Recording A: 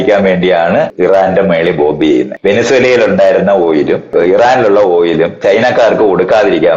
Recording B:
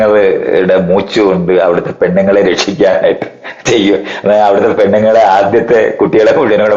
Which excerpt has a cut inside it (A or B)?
A